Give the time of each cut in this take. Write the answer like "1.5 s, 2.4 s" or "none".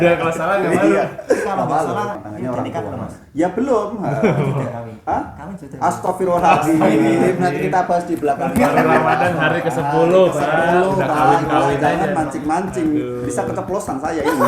2.2 s